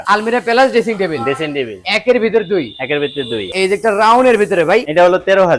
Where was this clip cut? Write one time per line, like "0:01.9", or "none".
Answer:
none